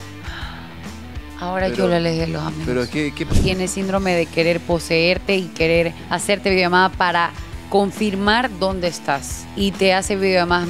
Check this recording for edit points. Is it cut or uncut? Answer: cut